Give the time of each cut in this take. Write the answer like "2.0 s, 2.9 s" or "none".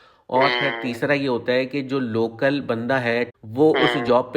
3.3 s